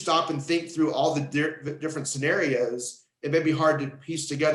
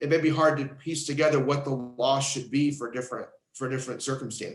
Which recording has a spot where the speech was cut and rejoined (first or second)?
second